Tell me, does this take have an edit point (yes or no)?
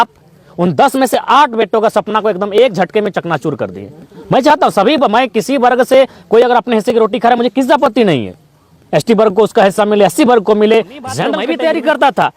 yes